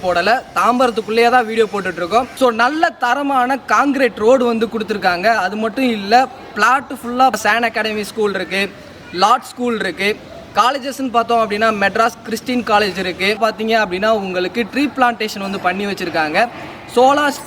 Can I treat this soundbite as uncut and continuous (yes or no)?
no